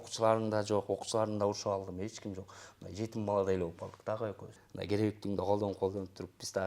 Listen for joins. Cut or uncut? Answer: cut